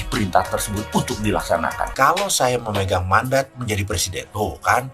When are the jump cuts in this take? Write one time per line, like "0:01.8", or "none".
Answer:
0:01.9